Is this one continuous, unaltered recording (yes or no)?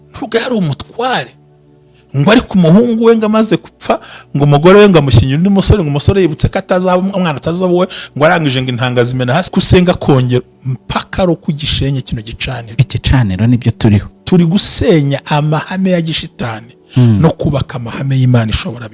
no